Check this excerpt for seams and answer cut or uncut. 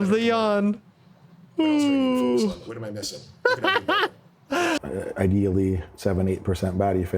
cut